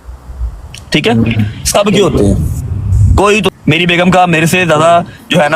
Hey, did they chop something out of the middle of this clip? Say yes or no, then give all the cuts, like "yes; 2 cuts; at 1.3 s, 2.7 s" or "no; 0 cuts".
yes; 1 cut; at 3.5 s